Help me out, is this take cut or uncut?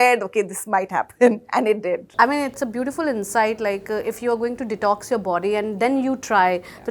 uncut